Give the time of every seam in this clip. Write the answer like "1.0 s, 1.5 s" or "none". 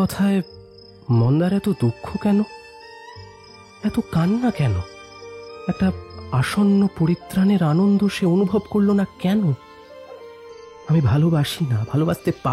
5.5 s